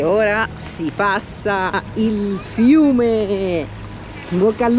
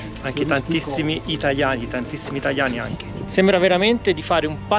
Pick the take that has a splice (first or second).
second